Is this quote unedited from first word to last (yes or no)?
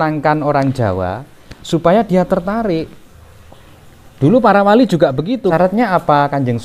no